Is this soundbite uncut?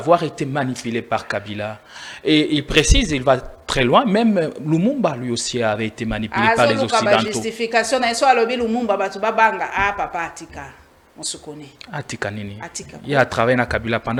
yes; 0 cuts

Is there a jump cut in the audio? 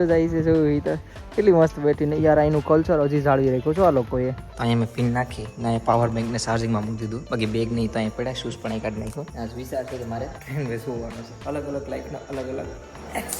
yes; 5 cuts; at 4.5 s, 7.2 s, 9.3 s, 10.4 s, 11.3 s

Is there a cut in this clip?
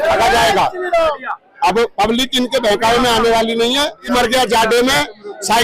yes; 1 cut; at 4.0 s

